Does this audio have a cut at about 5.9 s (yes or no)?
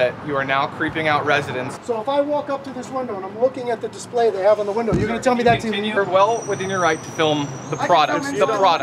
yes